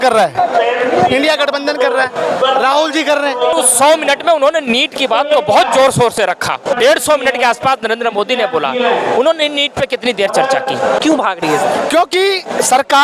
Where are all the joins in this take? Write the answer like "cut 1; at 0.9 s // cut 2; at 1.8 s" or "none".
cut 1; at 3.5 s // cut 2; at 6.7 s // cut 3; at 11.0 s